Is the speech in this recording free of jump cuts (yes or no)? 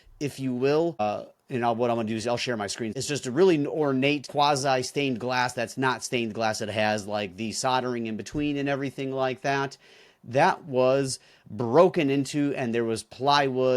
no